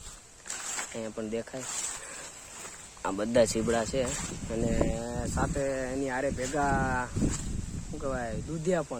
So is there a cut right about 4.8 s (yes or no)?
no